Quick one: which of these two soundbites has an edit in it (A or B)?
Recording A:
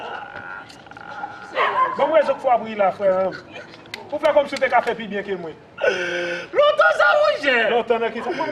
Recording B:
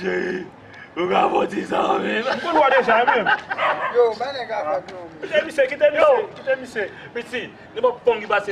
A